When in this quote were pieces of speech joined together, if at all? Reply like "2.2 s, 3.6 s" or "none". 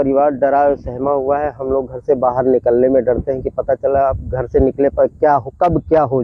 none